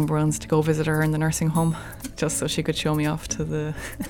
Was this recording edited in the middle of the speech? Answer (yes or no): no